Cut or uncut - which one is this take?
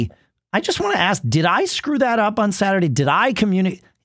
uncut